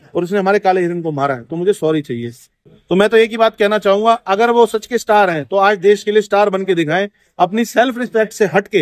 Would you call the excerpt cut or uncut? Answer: cut